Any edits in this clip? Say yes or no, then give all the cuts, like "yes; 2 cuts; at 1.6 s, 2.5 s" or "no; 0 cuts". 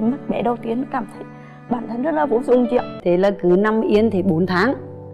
yes; 1 cut; at 2.9 s